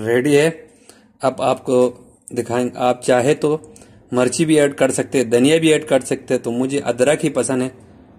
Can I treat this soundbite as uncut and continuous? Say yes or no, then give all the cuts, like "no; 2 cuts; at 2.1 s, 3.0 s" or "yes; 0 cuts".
yes; 0 cuts